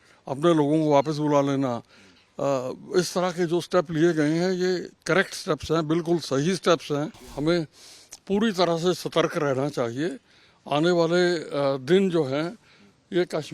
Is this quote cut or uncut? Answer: cut